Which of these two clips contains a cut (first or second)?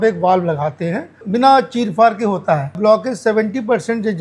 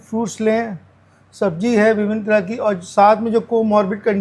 first